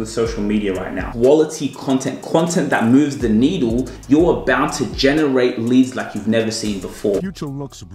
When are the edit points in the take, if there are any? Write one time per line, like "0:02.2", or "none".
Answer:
0:01.0
0:03.9
0:07.2

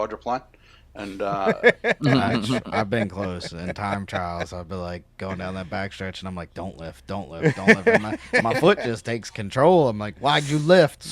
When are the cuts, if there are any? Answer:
0:01.5

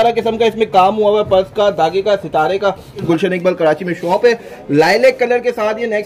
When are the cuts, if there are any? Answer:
0:03.0

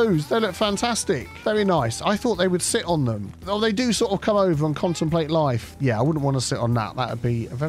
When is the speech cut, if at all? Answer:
0:05.7

